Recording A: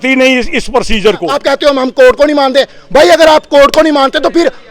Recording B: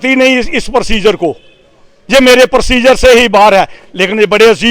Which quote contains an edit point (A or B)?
A